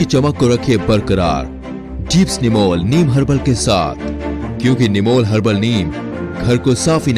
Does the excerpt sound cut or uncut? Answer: uncut